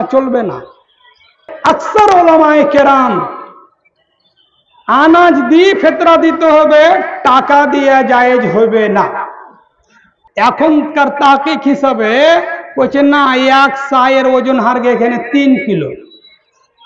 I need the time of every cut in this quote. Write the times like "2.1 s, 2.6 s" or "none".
1.5 s, 10.1 s